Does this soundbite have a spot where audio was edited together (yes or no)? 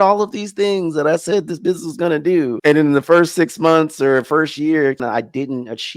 yes